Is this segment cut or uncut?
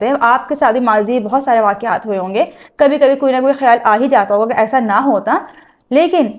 uncut